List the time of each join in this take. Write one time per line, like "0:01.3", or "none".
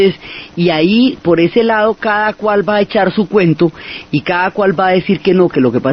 0:02.1